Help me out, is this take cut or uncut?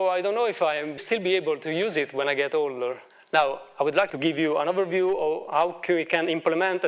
cut